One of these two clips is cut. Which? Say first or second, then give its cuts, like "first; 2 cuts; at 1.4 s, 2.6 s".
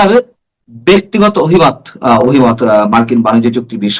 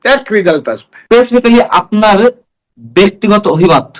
second; 1 cut; at 0.9 s